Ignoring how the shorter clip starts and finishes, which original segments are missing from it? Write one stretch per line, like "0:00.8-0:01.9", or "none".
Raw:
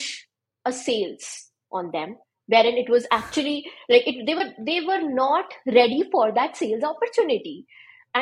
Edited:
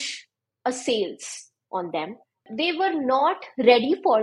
0:02.4-0:04.5